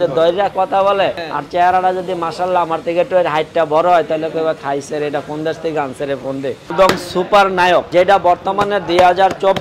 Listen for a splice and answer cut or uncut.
cut